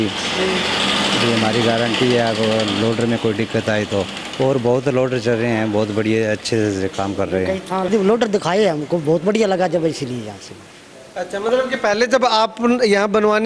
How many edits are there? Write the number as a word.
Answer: one